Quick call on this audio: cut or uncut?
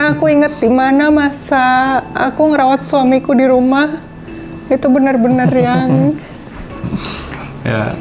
uncut